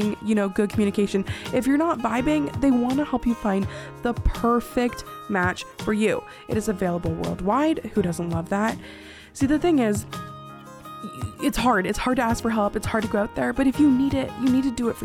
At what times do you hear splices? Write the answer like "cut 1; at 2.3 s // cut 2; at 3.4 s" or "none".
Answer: none